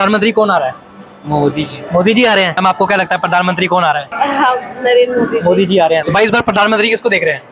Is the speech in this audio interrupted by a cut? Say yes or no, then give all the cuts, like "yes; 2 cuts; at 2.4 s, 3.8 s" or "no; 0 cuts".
yes; 3 cuts; at 2.6 s, 4.1 s, 6.0 s